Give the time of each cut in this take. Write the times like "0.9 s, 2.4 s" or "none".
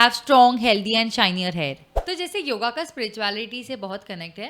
1.9 s